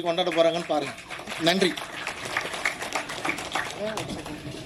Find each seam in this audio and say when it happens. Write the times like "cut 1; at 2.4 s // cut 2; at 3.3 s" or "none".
none